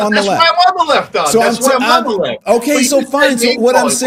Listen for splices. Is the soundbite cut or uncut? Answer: uncut